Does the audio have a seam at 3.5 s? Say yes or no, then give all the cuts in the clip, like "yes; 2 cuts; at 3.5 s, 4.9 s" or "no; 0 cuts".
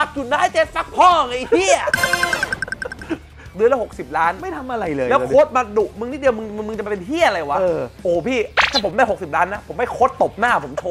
yes; 1 cut; at 3.5 s